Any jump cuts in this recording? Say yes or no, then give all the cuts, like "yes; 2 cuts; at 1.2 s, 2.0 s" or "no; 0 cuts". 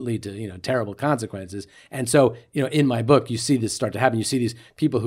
no; 0 cuts